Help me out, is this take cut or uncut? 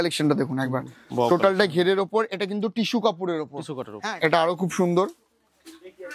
cut